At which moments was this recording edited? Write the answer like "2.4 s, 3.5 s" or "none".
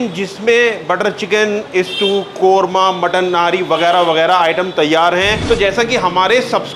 5.4 s